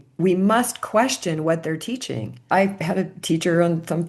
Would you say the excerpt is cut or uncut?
cut